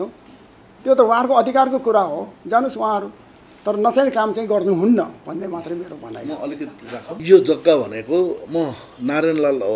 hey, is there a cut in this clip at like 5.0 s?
no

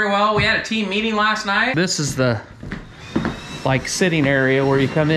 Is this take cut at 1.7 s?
yes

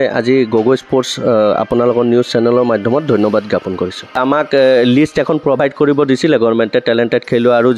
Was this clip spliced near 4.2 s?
yes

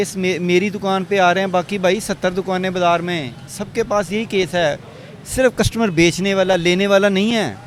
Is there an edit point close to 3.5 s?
no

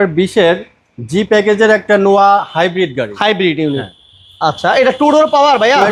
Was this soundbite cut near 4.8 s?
no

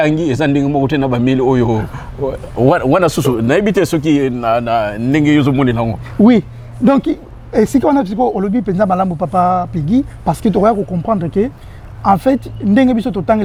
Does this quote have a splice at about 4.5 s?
no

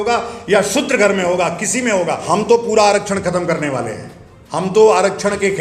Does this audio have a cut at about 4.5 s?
no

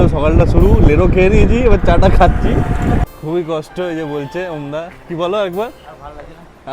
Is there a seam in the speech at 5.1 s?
no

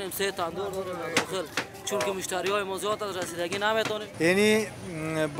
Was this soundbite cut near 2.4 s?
no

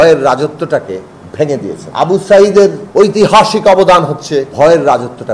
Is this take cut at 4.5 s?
yes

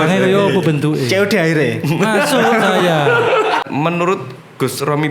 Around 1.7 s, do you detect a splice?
no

